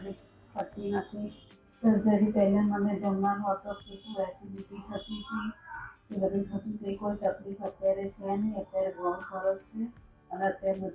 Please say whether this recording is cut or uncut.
cut